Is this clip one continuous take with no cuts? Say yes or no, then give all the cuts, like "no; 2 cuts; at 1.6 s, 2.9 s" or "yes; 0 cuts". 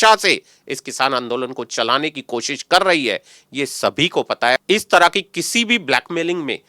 no; 1 cut; at 4.6 s